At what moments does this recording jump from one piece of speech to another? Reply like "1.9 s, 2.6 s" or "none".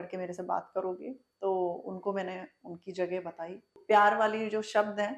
3.8 s